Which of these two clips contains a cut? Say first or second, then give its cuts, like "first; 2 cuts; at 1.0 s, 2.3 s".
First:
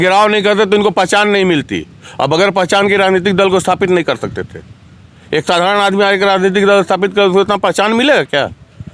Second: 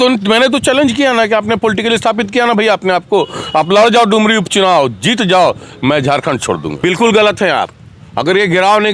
second; 1 cut; at 6.8 s